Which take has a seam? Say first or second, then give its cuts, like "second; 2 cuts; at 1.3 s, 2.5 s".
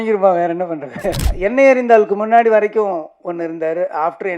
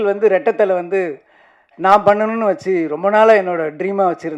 first; 1 cut; at 1.3 s